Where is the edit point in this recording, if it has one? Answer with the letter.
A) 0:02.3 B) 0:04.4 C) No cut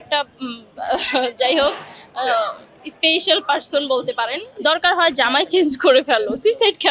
B